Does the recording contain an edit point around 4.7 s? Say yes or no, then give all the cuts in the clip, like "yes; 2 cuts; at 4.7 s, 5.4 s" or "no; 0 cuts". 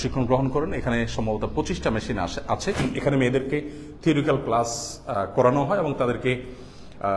no; 1 cut; at 2.8 s